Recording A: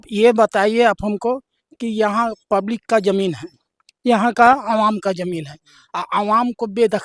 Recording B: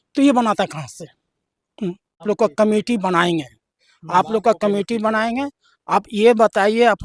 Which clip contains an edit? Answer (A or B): B